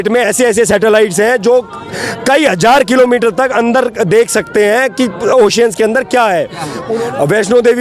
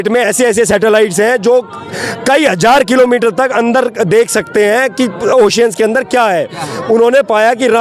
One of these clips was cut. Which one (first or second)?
first